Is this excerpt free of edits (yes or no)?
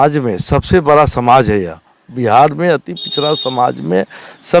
yes